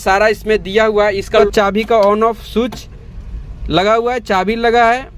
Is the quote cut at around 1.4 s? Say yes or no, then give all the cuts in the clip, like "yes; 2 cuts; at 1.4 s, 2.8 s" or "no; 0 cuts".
yes; 1 cut; at 1.4 s